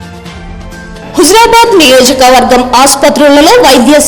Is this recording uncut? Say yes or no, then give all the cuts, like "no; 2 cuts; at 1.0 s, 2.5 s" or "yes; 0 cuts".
no; 1 cut; at 1.0 s